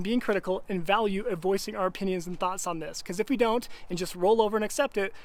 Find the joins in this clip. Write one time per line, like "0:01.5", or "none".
none